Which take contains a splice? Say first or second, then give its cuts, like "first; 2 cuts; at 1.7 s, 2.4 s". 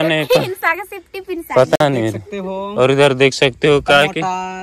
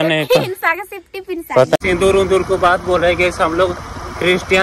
second; 1 cut; at 1.8 s